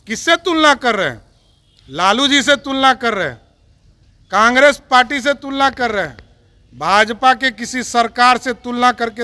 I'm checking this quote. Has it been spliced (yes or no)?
no